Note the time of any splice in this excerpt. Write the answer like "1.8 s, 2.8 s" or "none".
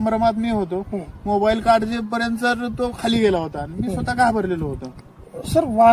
none